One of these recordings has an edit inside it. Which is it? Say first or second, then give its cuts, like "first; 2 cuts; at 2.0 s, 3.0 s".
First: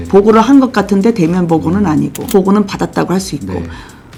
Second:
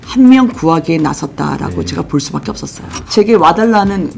second; 1 cut; at 2.9 s